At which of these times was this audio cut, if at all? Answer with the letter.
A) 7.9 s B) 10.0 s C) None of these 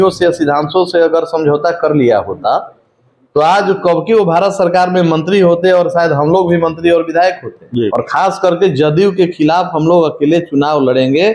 A